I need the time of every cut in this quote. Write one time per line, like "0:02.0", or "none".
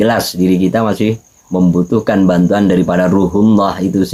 none